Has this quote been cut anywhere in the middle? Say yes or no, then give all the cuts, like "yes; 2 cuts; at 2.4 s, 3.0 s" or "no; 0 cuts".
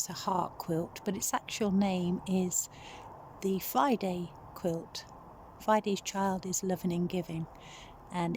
no; 0 cuts